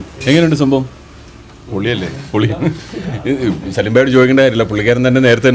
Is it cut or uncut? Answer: uncut